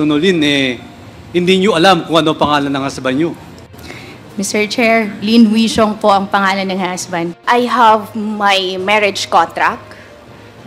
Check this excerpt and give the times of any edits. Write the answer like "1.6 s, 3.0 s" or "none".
7.3 s